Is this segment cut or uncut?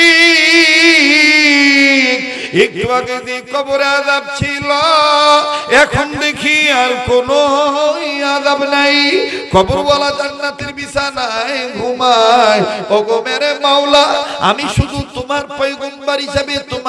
uncut